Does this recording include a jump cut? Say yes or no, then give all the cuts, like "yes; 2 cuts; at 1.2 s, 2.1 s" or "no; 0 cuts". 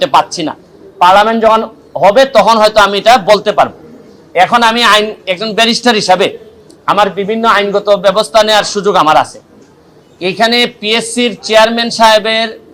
no; 0 cuts